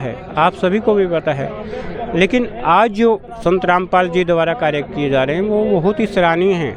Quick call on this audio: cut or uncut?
uncut